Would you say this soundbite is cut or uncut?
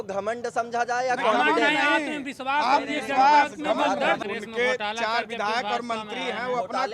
cut